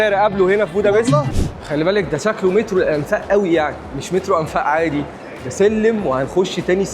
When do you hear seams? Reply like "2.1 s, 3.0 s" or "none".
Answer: 1.3 s